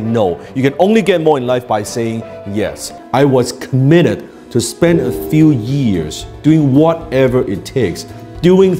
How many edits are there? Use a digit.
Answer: 1